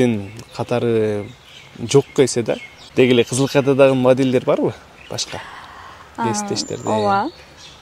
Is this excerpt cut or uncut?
cut